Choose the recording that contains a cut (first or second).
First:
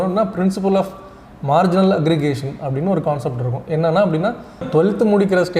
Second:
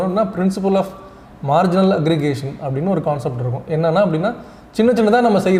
first